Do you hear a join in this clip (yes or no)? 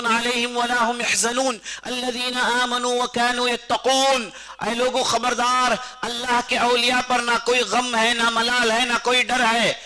no